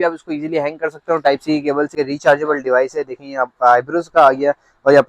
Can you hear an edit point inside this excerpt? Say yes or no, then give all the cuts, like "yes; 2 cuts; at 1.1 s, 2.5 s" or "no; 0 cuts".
yes; 1 cut; at 1.9 s